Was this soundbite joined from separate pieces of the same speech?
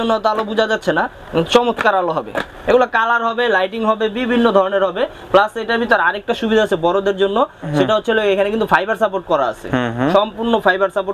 no; 0 cuts

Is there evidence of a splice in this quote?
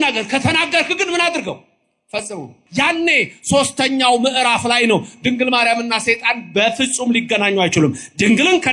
yes; 1 cut; at 2.6 s

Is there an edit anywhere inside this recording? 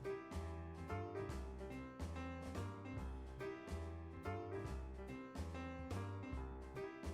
no; 0 cuts

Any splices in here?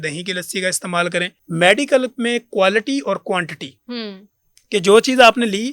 yes; 1 cut; at 1.4 s

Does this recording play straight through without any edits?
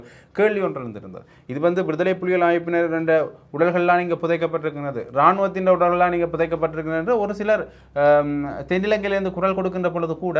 yes; 0 cuts

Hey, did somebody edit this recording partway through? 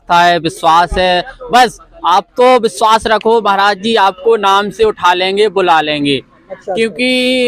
no; 0 cuts

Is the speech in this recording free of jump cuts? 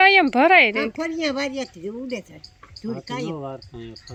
yes; 0 cuts

